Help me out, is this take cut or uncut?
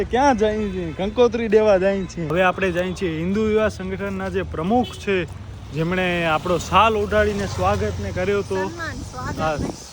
cut